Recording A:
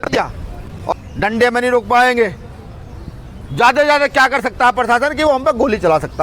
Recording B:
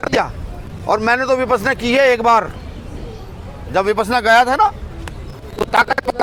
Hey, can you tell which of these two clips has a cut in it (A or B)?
A